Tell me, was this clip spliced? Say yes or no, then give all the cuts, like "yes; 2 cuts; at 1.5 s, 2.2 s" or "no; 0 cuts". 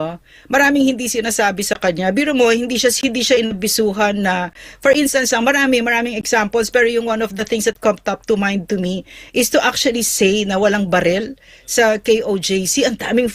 no; 0 cuts